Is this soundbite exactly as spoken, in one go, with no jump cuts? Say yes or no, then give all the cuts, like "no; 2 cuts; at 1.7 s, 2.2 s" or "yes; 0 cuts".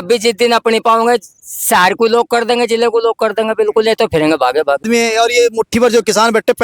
no; 1 cut; at 4.8 s